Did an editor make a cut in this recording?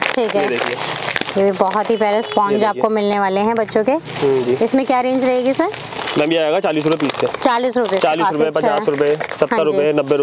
no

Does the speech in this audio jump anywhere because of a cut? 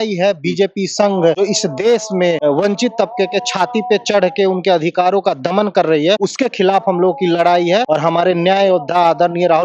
yes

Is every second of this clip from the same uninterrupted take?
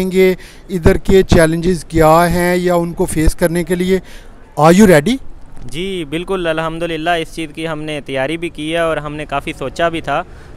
yes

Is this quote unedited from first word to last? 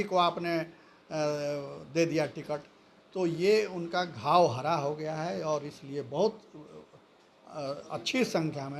yes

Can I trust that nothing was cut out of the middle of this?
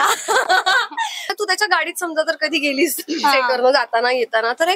no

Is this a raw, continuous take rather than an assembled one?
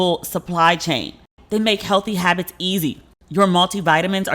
no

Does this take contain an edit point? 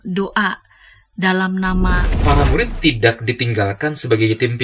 yes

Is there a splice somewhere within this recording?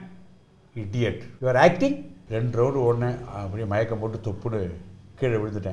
yes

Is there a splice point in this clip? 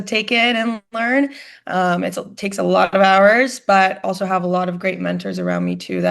no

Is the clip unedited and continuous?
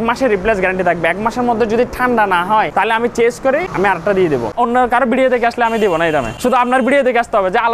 no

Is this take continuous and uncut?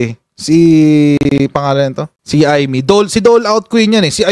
yes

